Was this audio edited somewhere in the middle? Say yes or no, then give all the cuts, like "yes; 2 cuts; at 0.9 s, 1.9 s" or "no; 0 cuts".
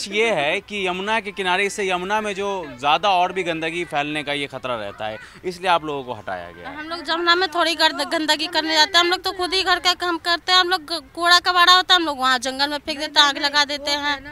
no; 0 cuts